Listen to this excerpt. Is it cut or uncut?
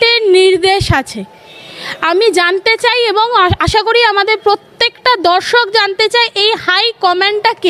uncut